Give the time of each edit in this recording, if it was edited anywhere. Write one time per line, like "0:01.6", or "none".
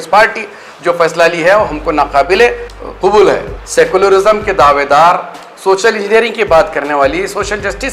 0:03.6

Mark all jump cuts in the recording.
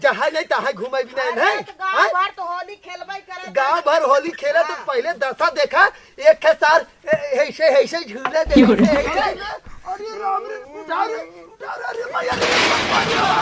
0:09.5

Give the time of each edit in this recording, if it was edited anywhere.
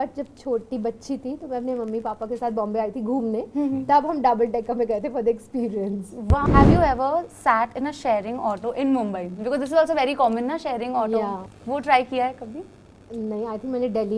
0:06.4
0:11.5

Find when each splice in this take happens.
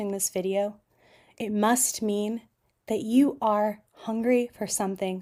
none

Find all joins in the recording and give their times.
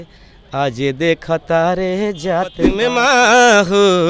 0:02.7

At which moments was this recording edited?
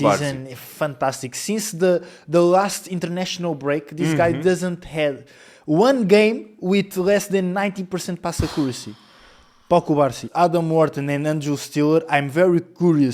0:10.2

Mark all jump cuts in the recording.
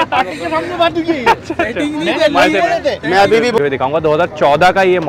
0:03.5

